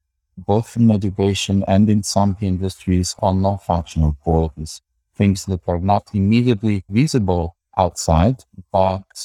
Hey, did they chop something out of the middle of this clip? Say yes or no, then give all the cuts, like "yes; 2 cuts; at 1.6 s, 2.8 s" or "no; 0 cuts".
no; 0 cuts